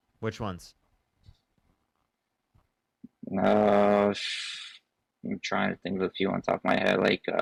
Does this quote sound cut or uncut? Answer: uncut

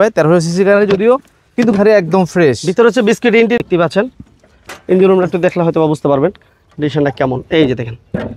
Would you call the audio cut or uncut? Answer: cut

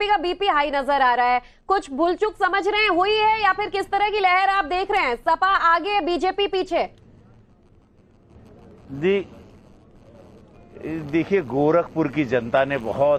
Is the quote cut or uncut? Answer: uncut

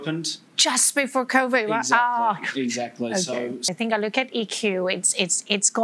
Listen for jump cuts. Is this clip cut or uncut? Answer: cut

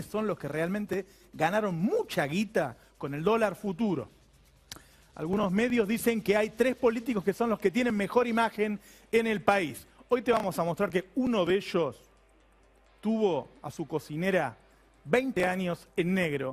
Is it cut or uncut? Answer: uncut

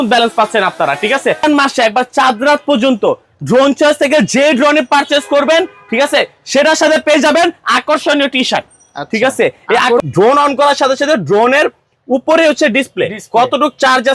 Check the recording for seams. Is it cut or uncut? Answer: cut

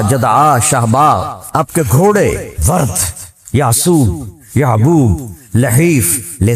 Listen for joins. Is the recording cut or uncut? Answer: cut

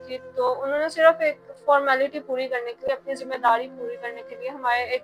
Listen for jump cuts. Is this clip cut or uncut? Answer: uncut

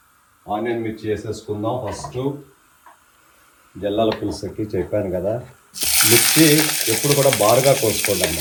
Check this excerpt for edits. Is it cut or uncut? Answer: uncut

